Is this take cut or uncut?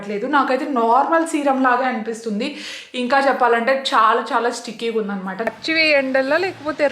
cut